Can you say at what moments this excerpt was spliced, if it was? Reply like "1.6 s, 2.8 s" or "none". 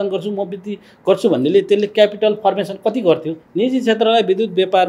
3.4 s